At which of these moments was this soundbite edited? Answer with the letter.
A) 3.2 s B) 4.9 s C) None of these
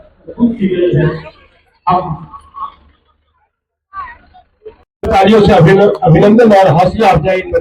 B